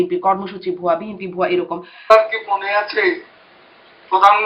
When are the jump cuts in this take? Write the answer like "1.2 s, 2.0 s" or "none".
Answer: 2.1 s